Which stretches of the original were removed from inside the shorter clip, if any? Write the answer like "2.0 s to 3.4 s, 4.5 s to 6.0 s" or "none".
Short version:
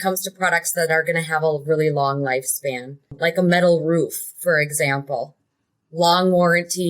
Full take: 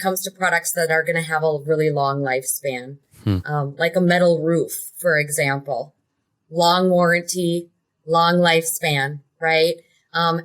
3.1 s to 3.7 s